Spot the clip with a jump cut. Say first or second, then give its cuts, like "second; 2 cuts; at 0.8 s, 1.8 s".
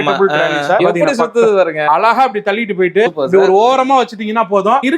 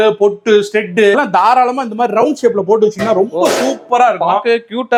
first; 2 cuts; at 1.9 s, 3.2 s